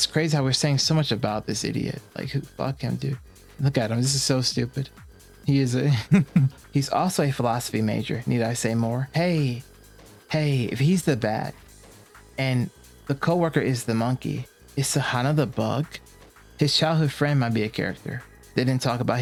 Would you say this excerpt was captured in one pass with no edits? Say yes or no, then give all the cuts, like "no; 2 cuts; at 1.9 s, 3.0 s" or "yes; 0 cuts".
yes; 0 cuts